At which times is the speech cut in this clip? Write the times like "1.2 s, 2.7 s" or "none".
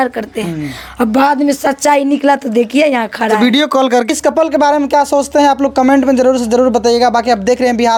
none

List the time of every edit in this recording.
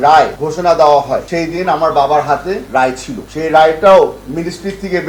none

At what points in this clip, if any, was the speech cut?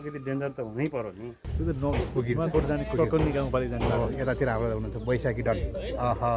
1.4 s

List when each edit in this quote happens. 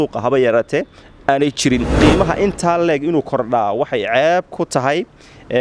1.9 s

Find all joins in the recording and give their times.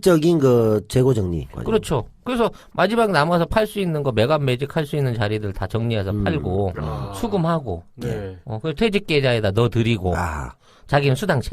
5.2 s

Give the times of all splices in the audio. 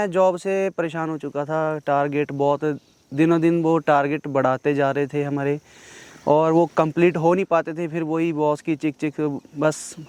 none

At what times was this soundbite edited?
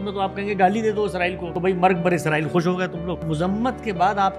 1.5 s, 3.2 s

